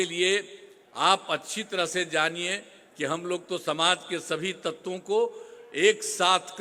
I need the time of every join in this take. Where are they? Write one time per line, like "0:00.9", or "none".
none